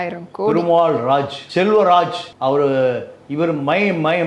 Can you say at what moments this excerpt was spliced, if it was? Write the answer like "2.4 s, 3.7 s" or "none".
1.4 s, 2.2 s